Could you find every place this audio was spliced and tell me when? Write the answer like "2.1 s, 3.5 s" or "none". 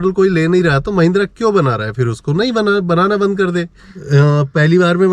3.9 s